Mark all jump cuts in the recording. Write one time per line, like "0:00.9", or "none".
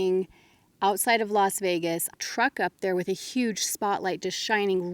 0:02.1